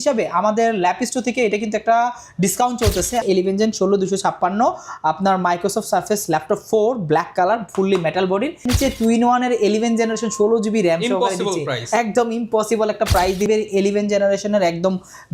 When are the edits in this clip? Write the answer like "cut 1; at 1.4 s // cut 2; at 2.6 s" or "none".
cut 1; at 3.2 s // cut 2; at 8.6 s // cut 3; at 13.5 s